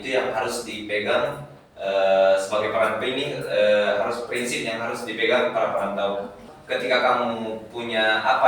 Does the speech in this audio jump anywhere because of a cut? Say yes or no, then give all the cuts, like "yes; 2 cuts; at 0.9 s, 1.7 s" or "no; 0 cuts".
yes; 1 cut; at 6.5 s